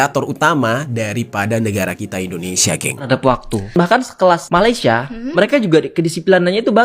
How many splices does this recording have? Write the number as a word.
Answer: one